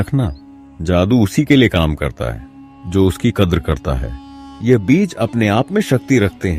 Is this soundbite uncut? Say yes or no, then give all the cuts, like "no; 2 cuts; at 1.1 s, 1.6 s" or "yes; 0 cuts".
yes; 0 cuts